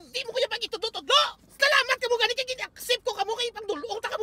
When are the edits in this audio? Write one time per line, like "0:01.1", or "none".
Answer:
0:01.6